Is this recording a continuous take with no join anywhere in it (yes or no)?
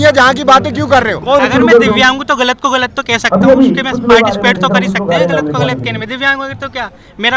no